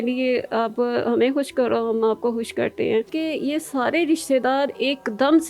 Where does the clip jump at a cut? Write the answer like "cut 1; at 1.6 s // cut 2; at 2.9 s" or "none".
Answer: cut 1; at 3.1 s